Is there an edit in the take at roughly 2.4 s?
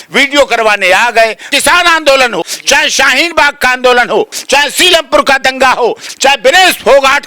yes; 4 cuts; at 1.4 s, 2.4 s, 4.3 s, 6.1 s

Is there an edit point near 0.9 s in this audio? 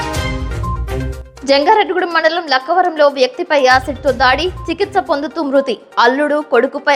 yes; 1 cut; at 0.9 s

